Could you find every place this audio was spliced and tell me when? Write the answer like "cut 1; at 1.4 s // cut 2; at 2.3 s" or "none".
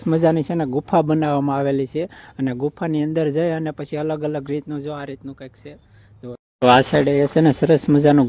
cut 1; at 6.6 s